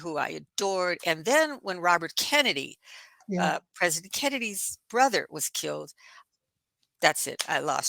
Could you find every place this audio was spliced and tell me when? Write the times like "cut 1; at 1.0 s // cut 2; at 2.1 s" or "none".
none

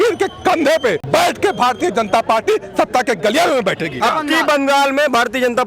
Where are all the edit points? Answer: cut 1; at 1.0 s // cut 2; at 4.0 s

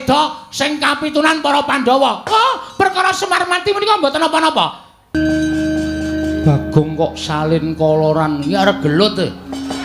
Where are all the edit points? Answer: cut 1; at 5.1 s

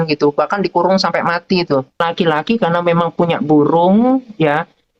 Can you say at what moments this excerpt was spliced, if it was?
cut 1; at 2.0 s

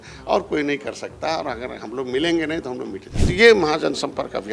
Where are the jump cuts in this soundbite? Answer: cut 1; at 3.1 s

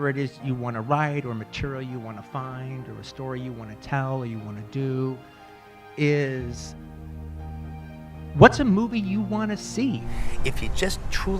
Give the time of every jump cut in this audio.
cut 1; at 10.1 s

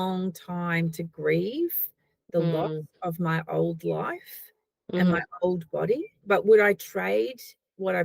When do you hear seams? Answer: cut 1; at 6.1 s

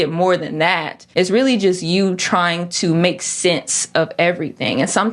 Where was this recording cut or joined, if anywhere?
cut 1; at 0.9 s

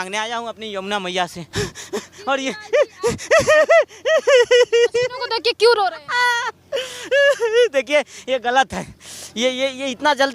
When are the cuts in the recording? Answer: cut 1; at 1.4 s

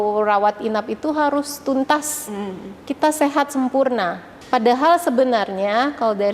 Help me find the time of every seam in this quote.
cut 1; at 4.3 s

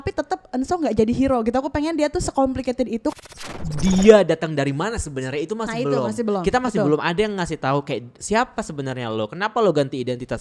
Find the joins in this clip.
cut 1; at 3.4 s // cut 2; at 8.1 s

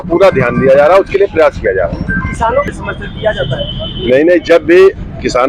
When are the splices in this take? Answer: cut 1; at 2.7 s

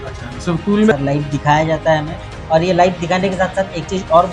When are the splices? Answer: cut 1; at 0.9 s

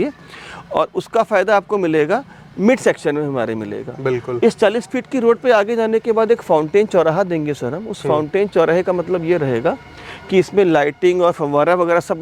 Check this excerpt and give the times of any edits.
none

